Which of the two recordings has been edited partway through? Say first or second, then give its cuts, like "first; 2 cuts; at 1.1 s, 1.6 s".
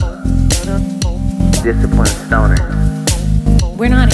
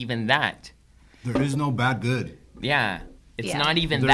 first; 1 cut; at 1.6 s